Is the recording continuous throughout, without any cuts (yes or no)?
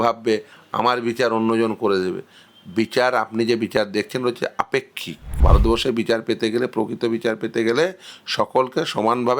no